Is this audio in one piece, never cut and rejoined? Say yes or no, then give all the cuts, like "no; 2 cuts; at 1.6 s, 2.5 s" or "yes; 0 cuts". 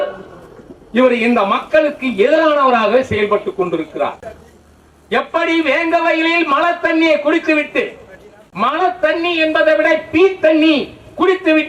yes; 0 cuts